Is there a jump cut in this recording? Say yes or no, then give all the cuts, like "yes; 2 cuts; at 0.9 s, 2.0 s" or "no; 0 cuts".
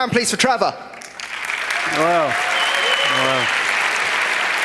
no; 0 cuts